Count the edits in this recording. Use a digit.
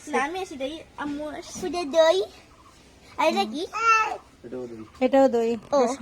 1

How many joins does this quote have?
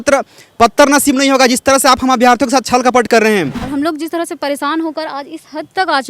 1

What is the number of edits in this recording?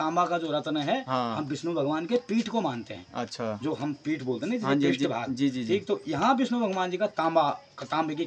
0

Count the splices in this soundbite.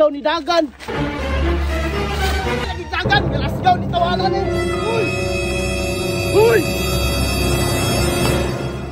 1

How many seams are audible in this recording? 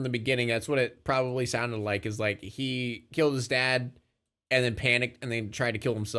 0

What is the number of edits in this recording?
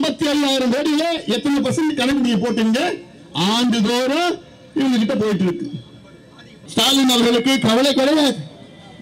1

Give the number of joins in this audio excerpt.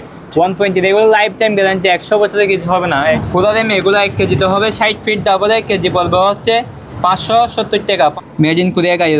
2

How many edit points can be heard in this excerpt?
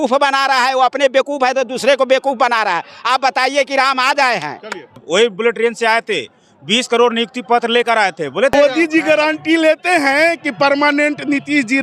2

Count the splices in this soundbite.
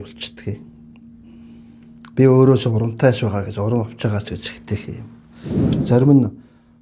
1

